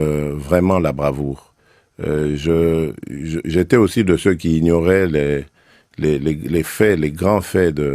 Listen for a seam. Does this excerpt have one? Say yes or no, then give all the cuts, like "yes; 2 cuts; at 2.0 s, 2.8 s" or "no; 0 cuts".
no; 0 cuts